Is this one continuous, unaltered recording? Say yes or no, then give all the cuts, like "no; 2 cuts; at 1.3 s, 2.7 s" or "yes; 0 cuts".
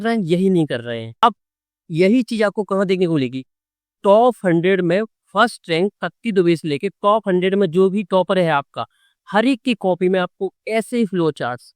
no; 1 cut; at 1.1 s